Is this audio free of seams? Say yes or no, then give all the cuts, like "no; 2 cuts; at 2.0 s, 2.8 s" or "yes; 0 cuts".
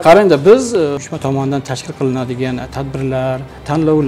no; 1 cut; at 1.0 s